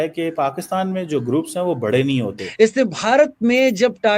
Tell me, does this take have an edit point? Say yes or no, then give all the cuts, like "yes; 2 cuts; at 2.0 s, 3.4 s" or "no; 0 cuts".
yes; 1 cut; at 2.4 s